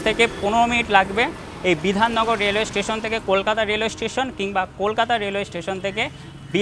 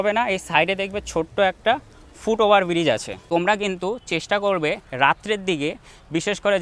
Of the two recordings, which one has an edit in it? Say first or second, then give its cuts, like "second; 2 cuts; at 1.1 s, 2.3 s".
second; 1 cut; at 3.1 s